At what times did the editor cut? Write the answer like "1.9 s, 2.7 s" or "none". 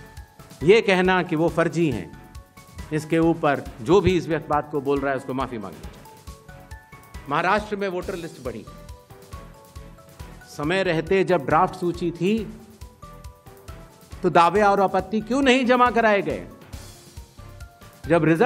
8.7 s, 10.5 s, 12.8 s, 14.2 s